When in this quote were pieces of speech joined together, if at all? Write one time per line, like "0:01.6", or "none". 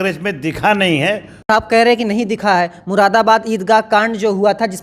0:01.5